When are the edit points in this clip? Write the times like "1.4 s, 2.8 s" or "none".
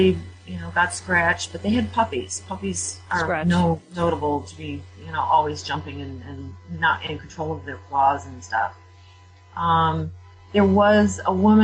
3.4 s